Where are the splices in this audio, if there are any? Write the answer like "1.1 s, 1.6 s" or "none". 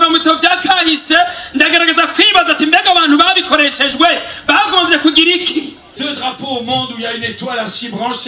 6.0 s